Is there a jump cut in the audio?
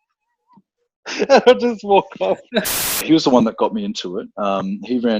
yes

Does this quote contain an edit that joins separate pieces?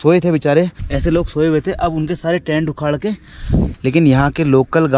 yes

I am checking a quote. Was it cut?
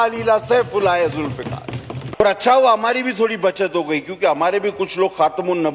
yes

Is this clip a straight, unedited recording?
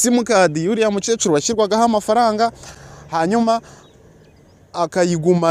yes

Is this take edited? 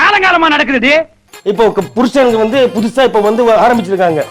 yes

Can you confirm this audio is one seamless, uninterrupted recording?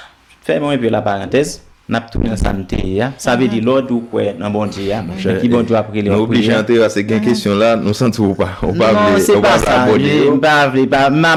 yes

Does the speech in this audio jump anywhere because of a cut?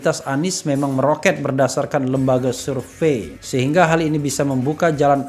yes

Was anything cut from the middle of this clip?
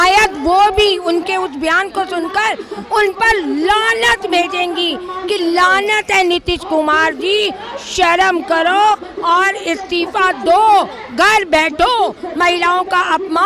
no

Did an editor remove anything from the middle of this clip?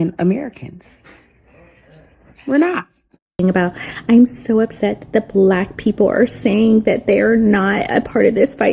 yes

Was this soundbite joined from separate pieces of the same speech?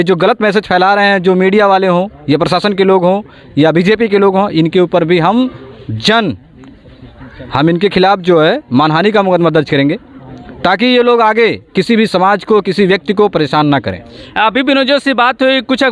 no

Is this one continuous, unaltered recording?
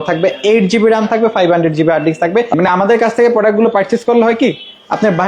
no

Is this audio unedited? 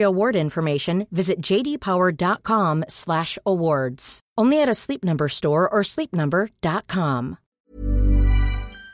no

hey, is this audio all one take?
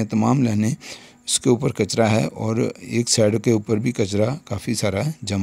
yes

